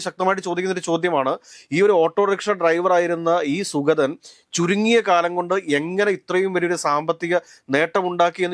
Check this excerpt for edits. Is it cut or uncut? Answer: uncut